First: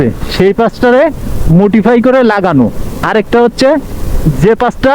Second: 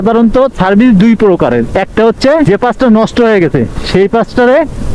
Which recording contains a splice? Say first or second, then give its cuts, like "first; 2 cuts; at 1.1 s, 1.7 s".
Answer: second; 1 cut; at 2.5 s